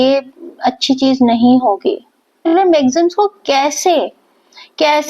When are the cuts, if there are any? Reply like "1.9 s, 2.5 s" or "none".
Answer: 2.4 s

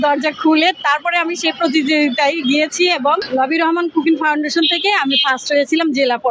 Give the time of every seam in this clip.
3.2 s

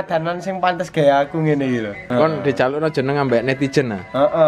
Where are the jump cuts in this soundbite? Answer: 2.0 s

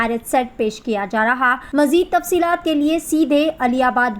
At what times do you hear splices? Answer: 1.6 s

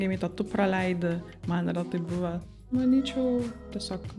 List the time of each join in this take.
2.4 s

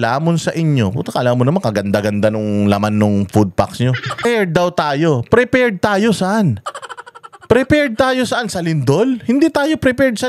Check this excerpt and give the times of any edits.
4.2 s

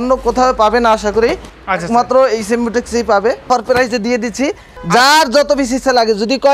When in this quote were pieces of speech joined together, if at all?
3.5 s, 4.7 s

